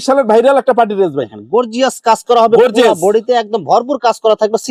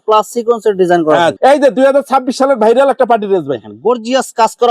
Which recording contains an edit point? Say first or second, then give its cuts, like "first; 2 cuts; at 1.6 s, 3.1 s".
second; 1 cut; at 1.4 s